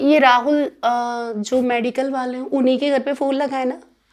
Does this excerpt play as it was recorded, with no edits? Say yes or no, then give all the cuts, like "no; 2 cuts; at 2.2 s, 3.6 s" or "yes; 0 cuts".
yes; 0 cuts